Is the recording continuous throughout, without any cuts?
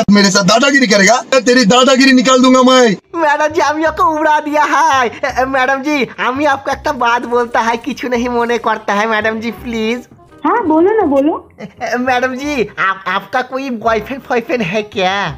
no; 2 cuts; at 1.3 s, 3.1 s

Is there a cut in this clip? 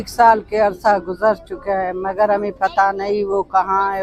no; 0 cuts

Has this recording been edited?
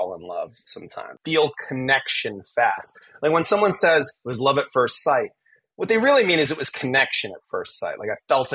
yes; 1 cut; at 1.1 s

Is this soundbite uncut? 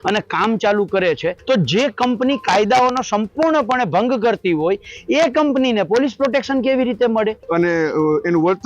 no; 2 cuts; at 1.4 s, 7.4 s

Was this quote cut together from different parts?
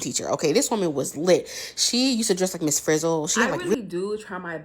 yes; 1 cut; at 3.7 s

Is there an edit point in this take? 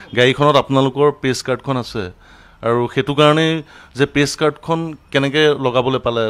no; 0 cuts

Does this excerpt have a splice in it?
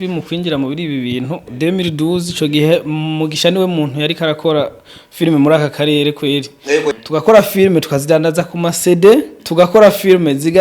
yes; 2 cuts; at 7.0 s, 9.4 s

